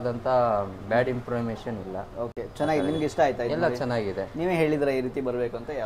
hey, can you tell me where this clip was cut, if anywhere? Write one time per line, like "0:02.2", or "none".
none